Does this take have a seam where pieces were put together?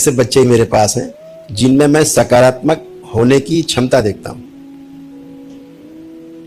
no; 0 cuts

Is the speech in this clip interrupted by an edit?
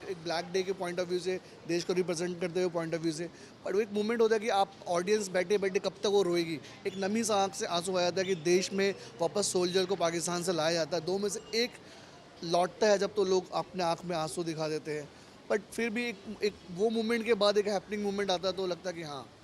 no; 0 cuts

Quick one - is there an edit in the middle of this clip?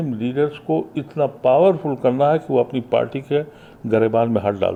no; 0 cuts

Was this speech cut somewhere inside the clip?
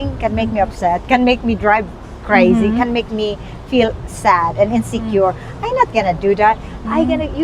no; 0 cuts

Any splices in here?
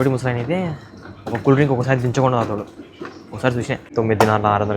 yes; 1 cut; at 3.9 s

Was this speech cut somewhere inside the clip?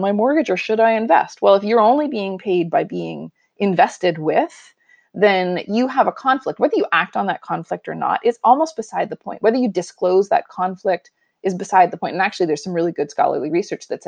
no; 0 cuts

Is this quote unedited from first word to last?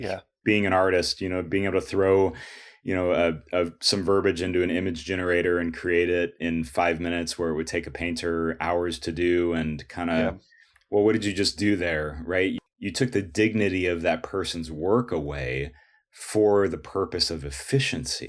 no; 1 cut; at 12.6 s

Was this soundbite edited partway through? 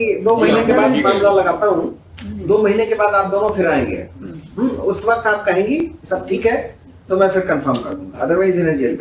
no; 0 cuts

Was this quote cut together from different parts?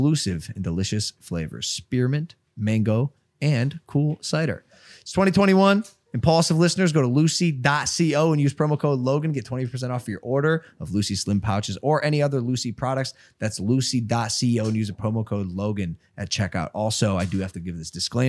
no; 0 cuts

